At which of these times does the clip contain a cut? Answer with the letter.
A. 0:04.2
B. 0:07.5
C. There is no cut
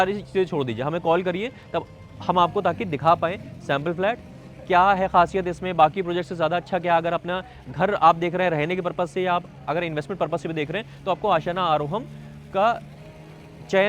C